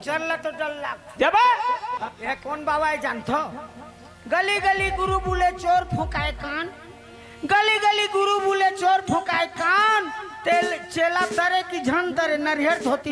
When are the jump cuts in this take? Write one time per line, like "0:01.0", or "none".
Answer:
0:02.0